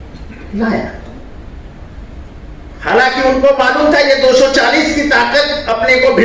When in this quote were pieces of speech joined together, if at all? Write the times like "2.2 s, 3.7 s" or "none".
none